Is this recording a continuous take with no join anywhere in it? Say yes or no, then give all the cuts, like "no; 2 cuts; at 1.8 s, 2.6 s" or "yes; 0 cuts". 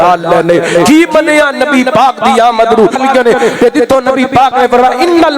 no; 1 cut; at 3.0 s